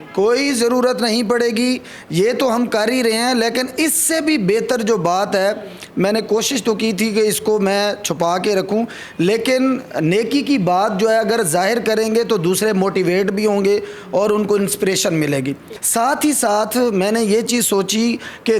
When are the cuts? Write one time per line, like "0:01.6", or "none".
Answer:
none